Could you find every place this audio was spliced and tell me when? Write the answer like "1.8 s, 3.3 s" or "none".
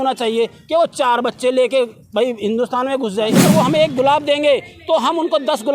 3.3 s